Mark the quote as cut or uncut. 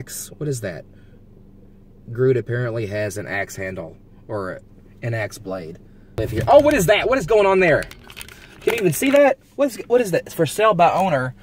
cut